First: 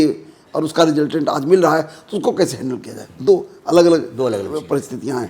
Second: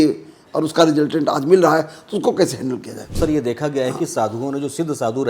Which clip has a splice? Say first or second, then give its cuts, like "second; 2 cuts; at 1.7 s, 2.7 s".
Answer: second; 1 cut; at 3.2 s